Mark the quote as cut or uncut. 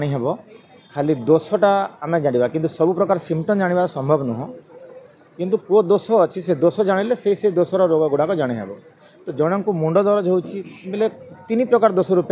uncut